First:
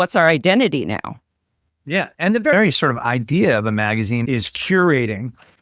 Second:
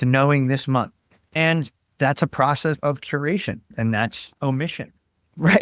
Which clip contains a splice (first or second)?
second